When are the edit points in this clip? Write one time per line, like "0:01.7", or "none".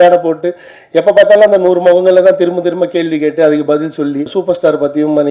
0:04.4

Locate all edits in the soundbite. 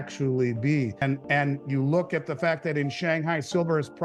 0:01.0

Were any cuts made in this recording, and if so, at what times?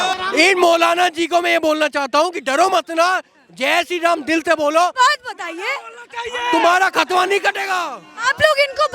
none

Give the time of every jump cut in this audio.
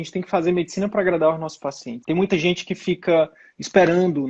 0:01.9

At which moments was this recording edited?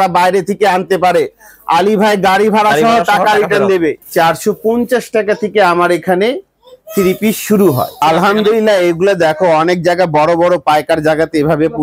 0:04.0
0:08.0

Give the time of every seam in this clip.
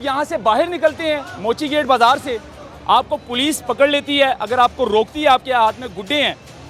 none

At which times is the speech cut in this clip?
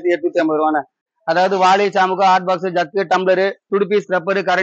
0:01.0

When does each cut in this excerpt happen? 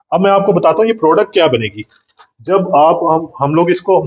none

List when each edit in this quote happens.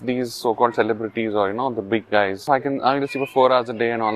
0:02.4

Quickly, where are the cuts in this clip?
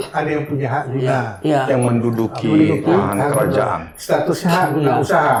none

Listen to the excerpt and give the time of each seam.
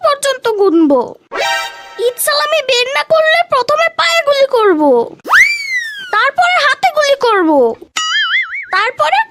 none

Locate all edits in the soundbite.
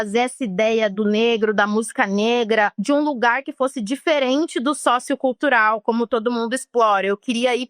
0:02.8

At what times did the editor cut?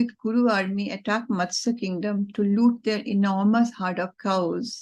none

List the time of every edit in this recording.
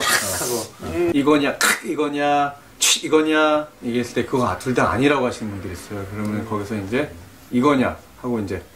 0:01.1

